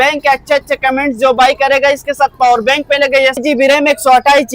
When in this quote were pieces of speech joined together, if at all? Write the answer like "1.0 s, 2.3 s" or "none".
3.4 s